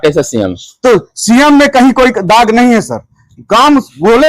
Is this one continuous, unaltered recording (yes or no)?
yes